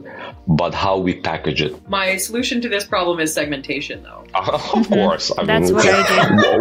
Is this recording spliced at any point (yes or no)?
yes